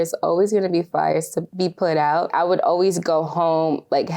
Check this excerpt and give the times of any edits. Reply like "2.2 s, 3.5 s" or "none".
1.4 s, 2.3 s